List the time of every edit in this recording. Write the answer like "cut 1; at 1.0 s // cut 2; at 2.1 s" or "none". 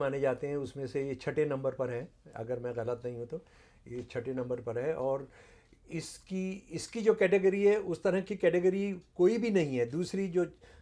none